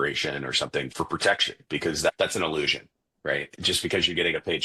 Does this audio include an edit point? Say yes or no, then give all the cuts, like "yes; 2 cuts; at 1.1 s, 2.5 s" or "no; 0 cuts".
yes; 3 cuts; at 0.9 s, 2.1 s, 3.5 s